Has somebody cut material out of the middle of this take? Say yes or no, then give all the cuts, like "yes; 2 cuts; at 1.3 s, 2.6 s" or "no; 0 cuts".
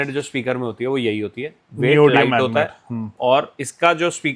no; 0 cuts